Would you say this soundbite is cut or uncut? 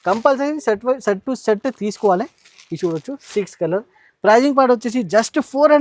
uncut